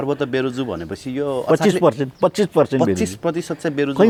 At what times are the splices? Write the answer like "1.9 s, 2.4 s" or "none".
none